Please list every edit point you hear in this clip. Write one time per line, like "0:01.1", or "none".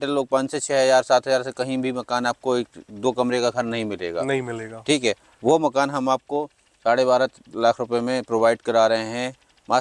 none